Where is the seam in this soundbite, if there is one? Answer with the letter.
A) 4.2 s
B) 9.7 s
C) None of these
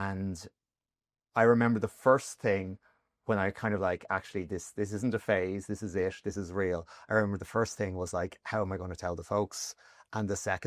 C